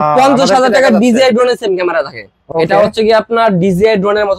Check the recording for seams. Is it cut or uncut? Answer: cut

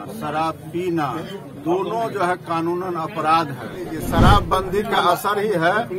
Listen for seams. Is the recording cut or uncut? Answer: cut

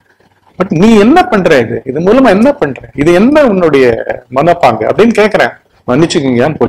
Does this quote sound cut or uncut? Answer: cut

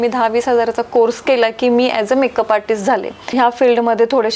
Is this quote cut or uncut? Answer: cut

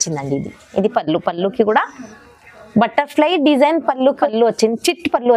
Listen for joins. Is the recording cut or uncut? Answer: cut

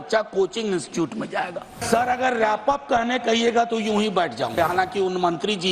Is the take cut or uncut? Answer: cut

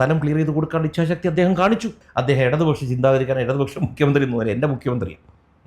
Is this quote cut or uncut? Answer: cut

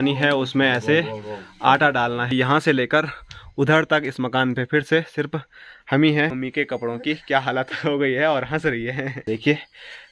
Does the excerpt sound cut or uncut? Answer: cut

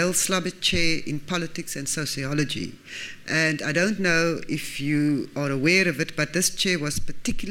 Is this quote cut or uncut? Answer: uncut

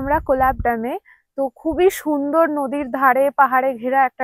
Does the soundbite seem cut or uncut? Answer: uncut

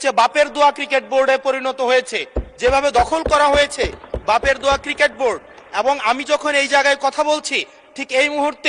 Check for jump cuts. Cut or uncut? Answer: uncut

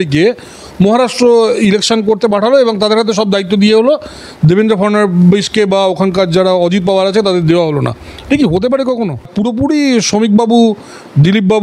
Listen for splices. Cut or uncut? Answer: cut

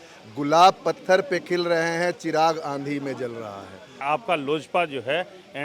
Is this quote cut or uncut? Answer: cut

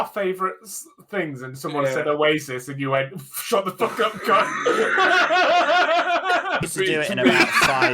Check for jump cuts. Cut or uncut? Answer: cut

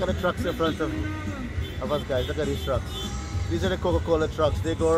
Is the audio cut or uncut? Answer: uncut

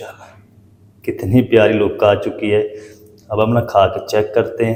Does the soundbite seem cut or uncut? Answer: uncut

